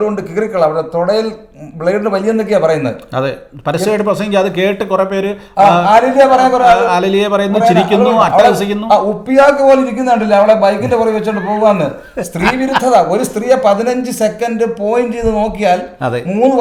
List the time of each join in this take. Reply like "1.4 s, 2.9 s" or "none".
none